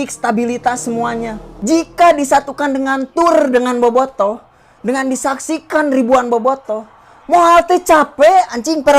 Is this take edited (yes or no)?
yes